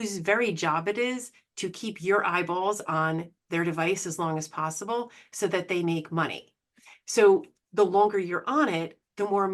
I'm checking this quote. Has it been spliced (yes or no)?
no